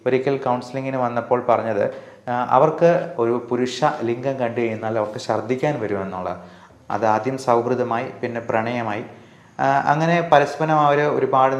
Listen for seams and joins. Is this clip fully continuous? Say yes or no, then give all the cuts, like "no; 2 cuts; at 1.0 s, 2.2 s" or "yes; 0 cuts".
no; 2 cuts; at 3.1 s, 6.5 s